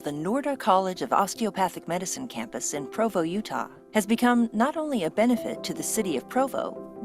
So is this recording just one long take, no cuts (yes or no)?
no